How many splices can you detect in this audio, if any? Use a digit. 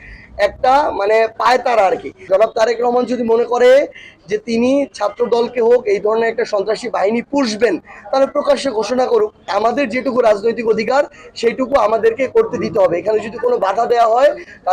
2